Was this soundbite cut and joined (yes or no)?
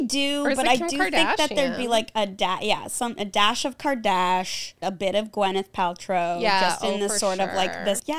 no